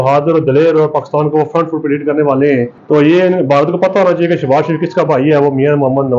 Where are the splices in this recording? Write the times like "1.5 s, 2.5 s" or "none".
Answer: 2.8 s